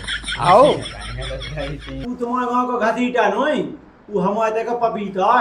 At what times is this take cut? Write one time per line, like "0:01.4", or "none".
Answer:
0:02.1

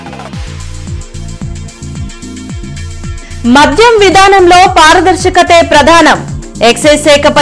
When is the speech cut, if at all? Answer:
0:01.3

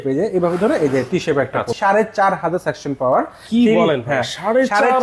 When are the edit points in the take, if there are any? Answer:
0:01.7

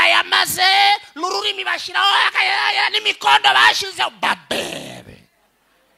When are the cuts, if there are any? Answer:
none

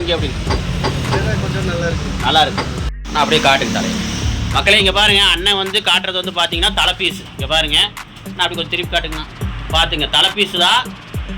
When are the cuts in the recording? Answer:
0:02.8

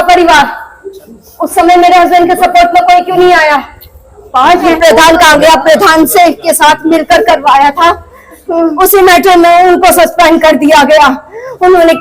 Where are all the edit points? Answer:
0:04.7
0:08.7

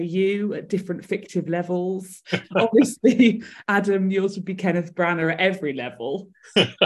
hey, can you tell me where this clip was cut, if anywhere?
0:02.2

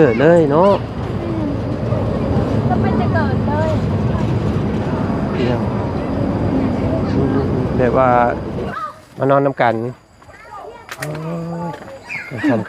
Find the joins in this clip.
0:08.7

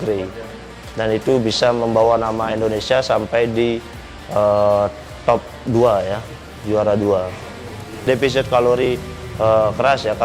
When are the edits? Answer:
0:08.0

